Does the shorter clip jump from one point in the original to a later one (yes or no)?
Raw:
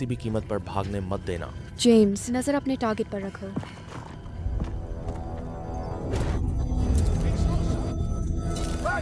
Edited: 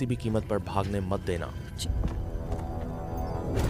yes